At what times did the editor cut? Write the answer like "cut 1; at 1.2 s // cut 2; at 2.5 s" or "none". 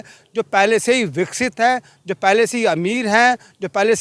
none